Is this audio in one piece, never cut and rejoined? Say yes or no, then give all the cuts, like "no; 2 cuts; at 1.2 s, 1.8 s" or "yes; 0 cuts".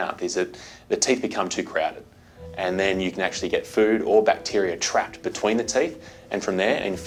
yes; 0 cuts